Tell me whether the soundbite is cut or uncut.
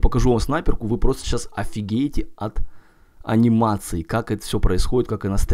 uncut